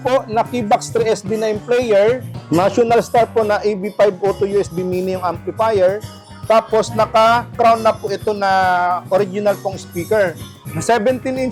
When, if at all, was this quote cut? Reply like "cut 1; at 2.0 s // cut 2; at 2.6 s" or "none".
none